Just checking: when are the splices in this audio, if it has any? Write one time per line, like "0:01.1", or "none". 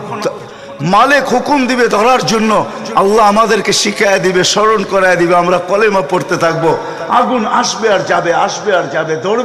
none